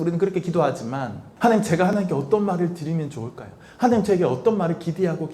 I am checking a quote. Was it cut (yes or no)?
yes